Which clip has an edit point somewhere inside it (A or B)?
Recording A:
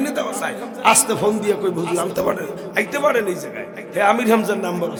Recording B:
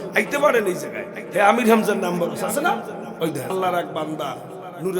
B